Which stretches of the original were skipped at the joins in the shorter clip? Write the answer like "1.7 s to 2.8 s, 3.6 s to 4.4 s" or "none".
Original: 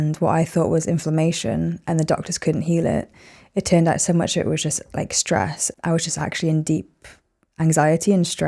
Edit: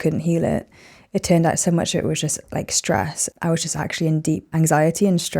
6.9 s to 7.5 s